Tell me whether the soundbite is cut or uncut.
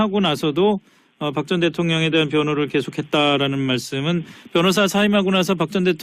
cut